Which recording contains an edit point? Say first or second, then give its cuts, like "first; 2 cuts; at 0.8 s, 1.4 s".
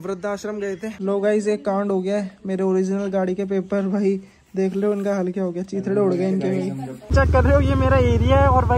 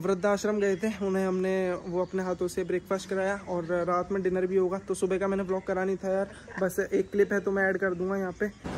first; 2 cuts; at 1.0 s, 7.1 s